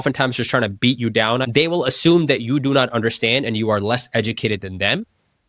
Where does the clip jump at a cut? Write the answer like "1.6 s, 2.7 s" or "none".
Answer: 1.4 s